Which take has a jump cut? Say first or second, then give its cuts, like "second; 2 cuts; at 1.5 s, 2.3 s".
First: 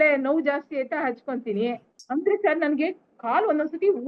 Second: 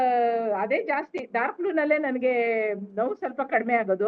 first; 1 cut; at 1.9 s